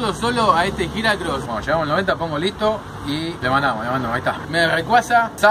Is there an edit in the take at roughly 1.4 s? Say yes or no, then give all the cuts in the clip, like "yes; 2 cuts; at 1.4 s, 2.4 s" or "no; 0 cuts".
yes; 1 cut; at 1.4 s